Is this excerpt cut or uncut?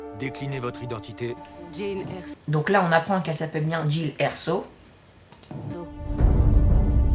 uncut